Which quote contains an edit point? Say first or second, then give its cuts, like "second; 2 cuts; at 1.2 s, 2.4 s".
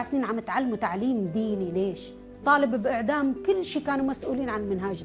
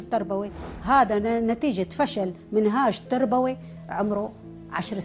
first; 1 cut; at 2.3 s